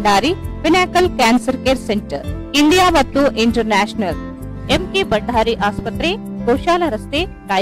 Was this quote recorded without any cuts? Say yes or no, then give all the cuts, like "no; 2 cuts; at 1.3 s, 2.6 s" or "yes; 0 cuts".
yes; 0 cuts